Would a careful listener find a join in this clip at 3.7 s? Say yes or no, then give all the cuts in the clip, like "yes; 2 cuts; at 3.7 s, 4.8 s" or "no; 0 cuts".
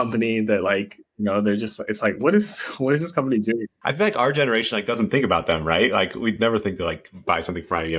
no; 0 cuts